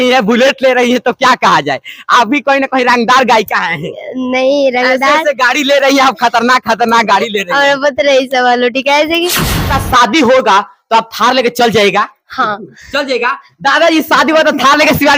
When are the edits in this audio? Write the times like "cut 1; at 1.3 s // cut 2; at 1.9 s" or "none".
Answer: cut 1; at 9.7 s